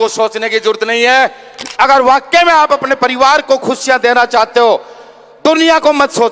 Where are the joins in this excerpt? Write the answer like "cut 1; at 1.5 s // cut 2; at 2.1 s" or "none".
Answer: cut 1; at 1.5 s